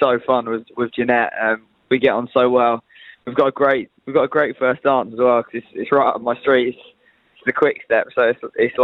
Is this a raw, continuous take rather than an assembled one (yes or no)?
yes